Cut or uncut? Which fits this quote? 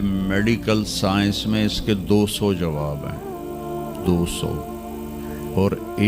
uncut